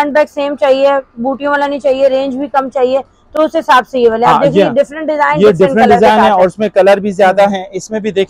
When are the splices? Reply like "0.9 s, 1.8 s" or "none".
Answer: none

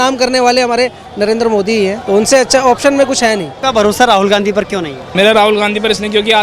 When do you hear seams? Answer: 2.0 s, 3.5 s, 5.0 s

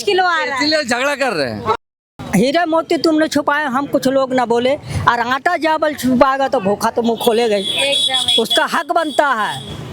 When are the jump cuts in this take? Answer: 1.9 s

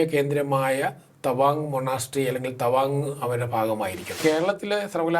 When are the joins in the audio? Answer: 4.2 s

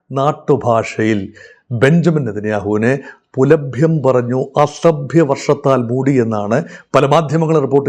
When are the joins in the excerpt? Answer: none

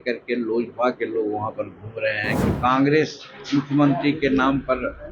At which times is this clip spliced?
2.3 s

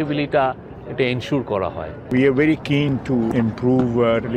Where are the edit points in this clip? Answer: 2.1 s, 3.3 s

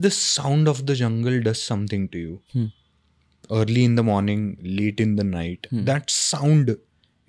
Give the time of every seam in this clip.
none

